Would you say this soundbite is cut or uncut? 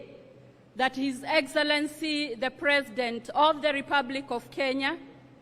cut